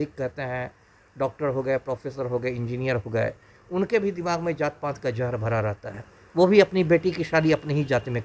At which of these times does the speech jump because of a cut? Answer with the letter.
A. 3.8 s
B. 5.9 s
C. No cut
C